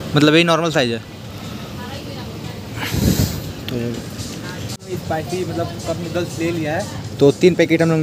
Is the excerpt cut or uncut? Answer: cut